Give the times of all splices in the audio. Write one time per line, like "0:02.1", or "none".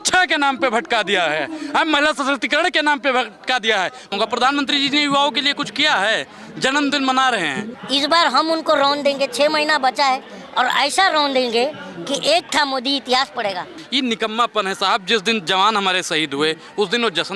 0:04.1
0:07.7
0:13.8